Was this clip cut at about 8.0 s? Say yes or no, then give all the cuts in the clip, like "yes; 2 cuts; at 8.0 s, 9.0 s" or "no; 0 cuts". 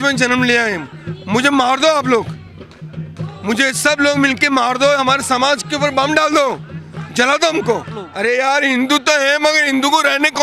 yes; 1 cut; at 8.0 s